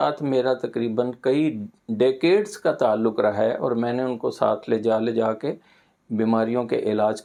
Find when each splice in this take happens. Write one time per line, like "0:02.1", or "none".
none